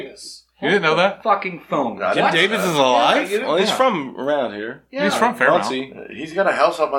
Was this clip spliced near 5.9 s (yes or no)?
no